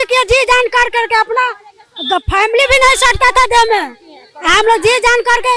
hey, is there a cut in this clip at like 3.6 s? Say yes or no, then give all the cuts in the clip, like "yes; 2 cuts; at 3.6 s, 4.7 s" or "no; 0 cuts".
no; 0 cuts